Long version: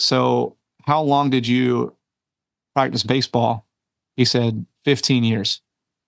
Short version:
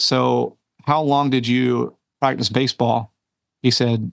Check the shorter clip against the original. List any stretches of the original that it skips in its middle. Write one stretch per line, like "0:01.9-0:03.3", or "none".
0:02.0-0:02.6